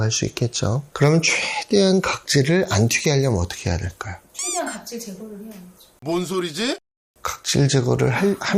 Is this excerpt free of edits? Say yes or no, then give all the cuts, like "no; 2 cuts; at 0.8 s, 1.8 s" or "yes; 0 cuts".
yes; 0 cuts